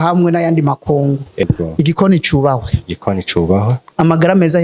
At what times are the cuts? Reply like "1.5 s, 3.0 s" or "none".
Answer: 1.4 s